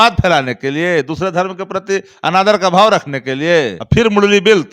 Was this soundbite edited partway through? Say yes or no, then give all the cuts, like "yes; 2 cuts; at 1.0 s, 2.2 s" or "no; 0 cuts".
yes; 1 cut; at 3.8 s